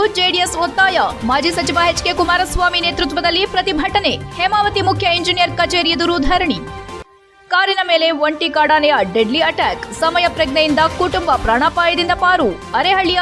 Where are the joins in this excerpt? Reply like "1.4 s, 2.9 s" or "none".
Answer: none